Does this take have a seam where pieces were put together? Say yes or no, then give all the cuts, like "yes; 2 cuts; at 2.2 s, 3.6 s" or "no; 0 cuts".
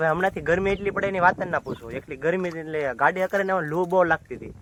no; 0 cuts